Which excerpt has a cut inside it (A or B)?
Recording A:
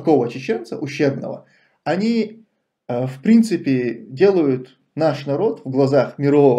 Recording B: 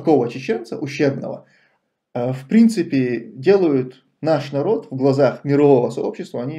B